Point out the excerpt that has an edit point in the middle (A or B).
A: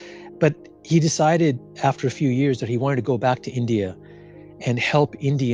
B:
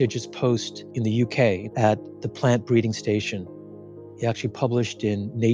B